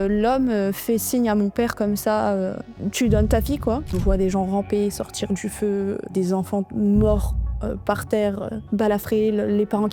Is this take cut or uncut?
cut